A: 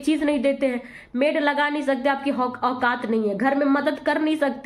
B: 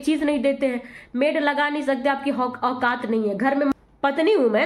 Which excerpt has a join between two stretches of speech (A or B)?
B